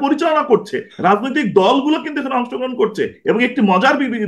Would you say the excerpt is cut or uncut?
uncut